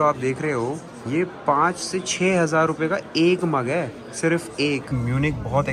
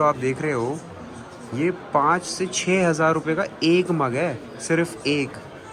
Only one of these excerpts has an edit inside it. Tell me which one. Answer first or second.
first